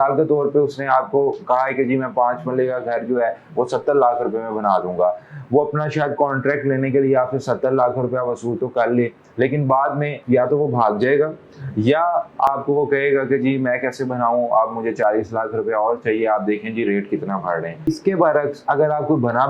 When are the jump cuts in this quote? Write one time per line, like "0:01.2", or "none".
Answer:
0:17.9